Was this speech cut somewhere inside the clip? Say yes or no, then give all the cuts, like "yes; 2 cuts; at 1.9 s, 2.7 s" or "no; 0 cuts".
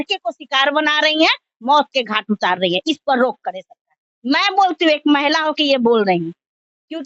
no; 0 cuts